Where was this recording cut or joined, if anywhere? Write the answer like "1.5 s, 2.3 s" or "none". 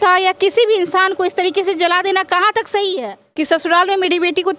3.2 s